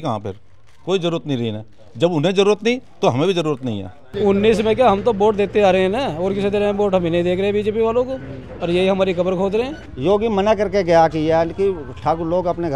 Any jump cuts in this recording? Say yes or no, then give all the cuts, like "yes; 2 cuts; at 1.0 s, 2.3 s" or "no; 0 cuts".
yes; 2 cuts; at 4.0 s, 9.8 s